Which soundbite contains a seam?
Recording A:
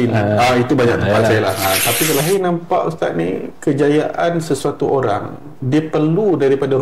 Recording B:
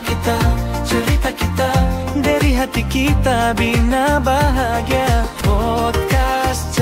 A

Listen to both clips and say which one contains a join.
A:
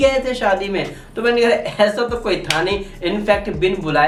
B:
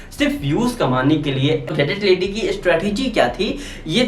B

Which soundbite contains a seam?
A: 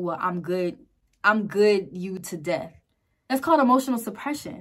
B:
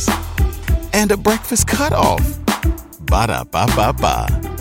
A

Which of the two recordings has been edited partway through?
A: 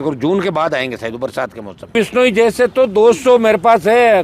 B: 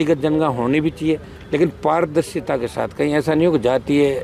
A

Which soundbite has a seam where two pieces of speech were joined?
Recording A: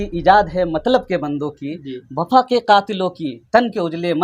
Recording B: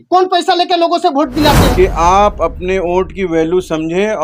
B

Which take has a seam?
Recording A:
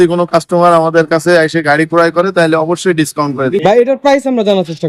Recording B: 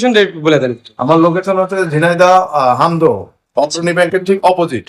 A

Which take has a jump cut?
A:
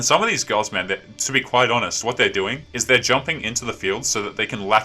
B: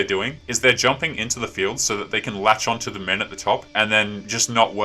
B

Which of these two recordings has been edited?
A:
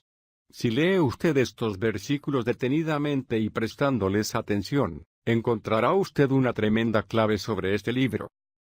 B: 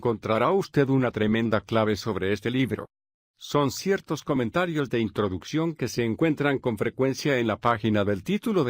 B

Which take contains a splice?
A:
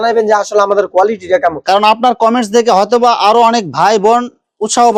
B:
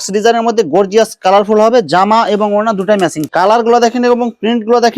B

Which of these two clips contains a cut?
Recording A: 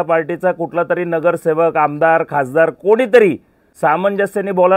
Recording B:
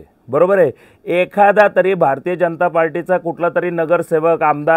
A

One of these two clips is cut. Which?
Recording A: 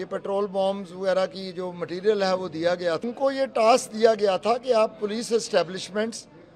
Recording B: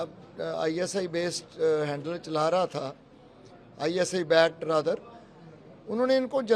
A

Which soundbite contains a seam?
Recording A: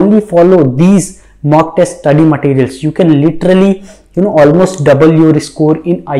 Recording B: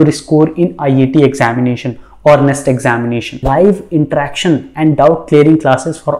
B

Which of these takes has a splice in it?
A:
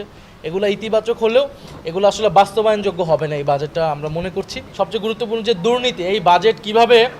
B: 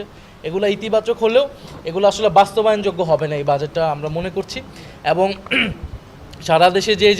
A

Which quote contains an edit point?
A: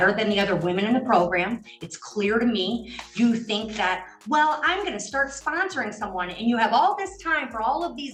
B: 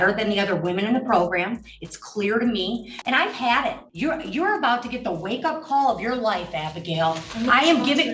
B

